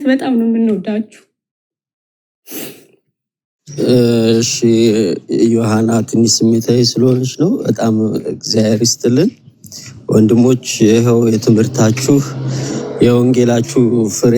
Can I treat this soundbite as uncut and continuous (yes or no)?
yes